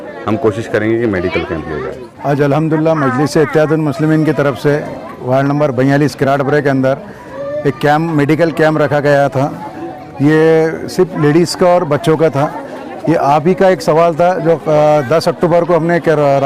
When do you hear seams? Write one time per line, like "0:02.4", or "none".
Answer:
0:02.0